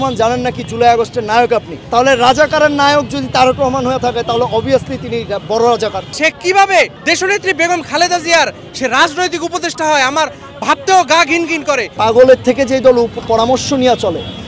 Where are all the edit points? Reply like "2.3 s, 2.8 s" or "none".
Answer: 1.8 s, 6.1 s, 7.0 s, 11.9 s